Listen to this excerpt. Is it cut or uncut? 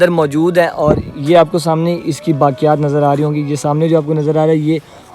uncut